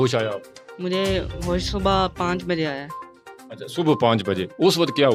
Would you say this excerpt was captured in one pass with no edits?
yes; 0 cuts

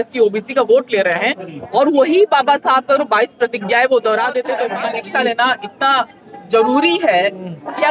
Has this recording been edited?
yes; 1 cut; at 4.7 s

